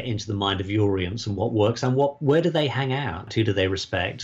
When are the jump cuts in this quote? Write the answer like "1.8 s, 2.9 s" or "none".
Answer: 3.3 s